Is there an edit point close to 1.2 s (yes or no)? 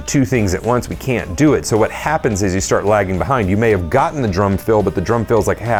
no